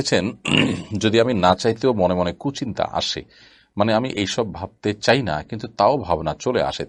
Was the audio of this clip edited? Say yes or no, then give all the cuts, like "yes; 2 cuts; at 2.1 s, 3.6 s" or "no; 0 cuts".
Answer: no; 0 cuts